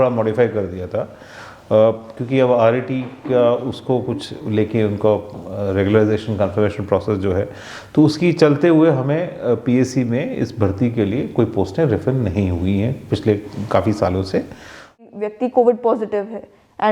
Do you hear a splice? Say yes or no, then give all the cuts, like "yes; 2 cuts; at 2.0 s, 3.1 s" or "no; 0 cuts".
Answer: yes; 1 cut; at 15.0 s